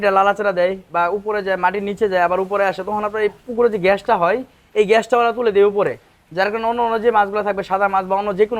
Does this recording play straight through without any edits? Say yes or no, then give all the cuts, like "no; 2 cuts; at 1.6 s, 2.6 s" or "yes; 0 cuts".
yes; 0 cuts